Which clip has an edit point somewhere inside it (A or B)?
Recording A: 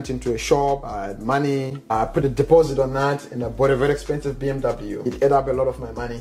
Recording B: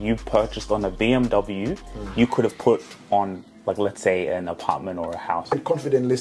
A